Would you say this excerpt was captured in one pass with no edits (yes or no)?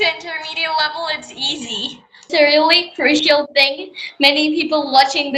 no